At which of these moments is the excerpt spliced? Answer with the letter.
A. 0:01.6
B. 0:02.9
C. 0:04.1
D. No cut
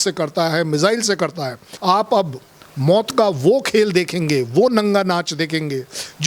A